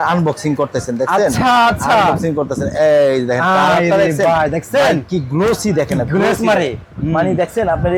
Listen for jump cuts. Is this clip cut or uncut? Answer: uncut